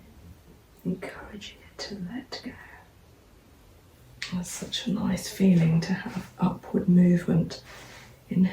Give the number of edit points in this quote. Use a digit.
1